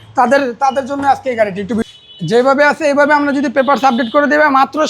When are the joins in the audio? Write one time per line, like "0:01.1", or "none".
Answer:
0:01.8